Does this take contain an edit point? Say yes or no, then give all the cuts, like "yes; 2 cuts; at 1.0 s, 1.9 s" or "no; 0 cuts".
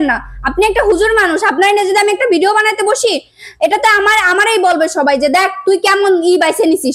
no; 0 cuts